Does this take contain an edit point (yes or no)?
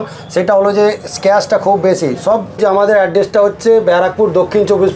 yes